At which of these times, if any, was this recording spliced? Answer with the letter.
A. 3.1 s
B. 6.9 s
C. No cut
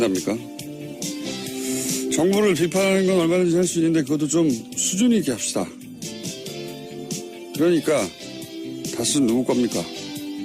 A